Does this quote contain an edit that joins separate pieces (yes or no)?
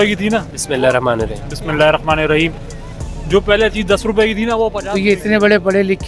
yes